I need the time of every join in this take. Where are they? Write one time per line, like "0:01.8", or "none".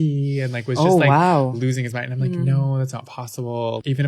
none